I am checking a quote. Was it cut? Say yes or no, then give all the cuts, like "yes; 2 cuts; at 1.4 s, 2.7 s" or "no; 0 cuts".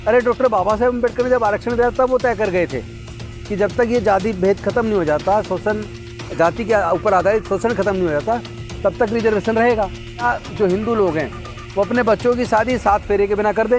yes; 1 cut; at 10.2 s